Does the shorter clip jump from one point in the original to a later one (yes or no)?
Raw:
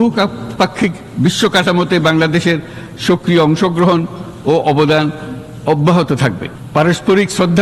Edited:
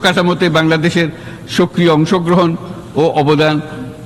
no